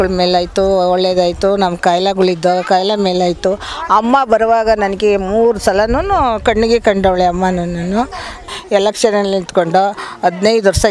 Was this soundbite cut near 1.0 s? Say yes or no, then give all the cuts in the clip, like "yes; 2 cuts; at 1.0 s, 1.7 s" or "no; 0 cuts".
no; 1 cut; at 8.4 s